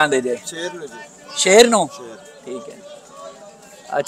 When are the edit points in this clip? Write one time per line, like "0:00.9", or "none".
none